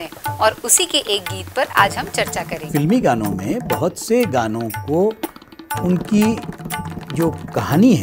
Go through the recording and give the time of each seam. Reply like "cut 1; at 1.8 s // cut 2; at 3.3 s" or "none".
cut 1; at 2.7 s